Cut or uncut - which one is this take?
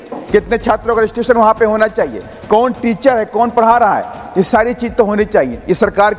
uncut